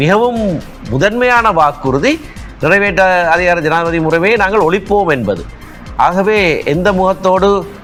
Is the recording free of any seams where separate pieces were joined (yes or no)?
yes